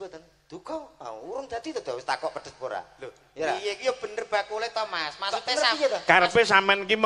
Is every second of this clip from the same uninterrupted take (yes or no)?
yes